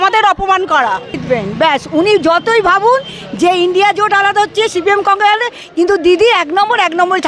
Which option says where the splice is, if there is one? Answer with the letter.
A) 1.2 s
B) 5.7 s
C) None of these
A